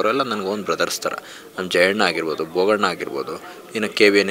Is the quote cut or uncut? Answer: uncut